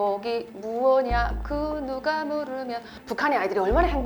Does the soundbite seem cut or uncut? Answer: cut